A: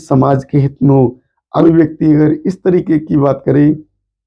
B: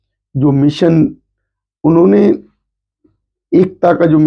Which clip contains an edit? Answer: A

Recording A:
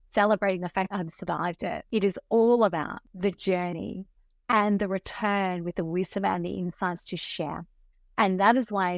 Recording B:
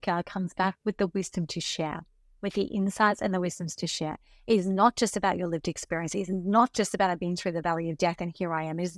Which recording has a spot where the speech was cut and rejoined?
A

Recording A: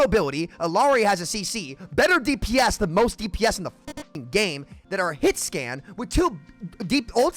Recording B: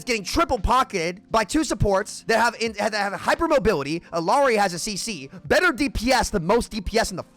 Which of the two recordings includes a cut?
B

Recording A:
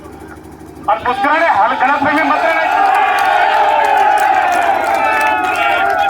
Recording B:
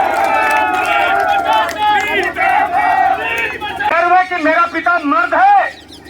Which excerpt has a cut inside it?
B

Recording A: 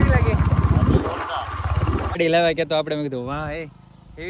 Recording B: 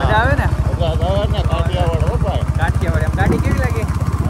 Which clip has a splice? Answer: A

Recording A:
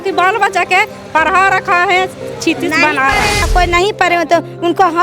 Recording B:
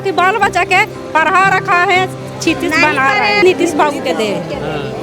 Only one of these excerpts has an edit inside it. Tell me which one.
A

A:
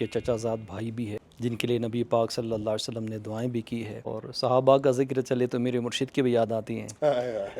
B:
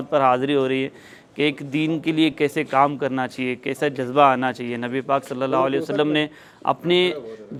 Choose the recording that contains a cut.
A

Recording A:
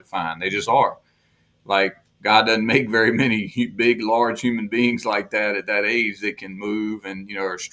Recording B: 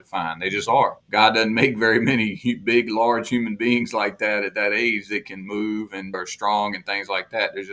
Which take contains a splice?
B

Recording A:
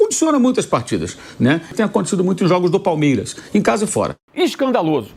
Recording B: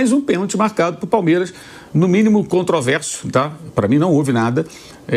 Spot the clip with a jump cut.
A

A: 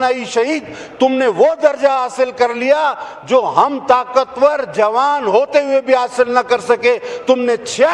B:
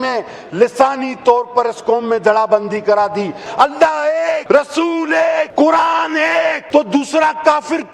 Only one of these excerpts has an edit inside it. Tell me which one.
B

